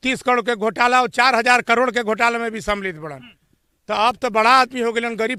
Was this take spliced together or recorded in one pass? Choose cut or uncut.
uncut